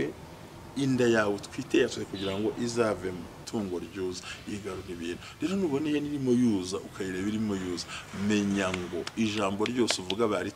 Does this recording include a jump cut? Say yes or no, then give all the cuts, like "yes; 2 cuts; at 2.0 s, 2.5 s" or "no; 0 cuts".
yes; 1 cut; at 3.4 s